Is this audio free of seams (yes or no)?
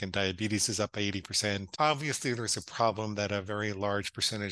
no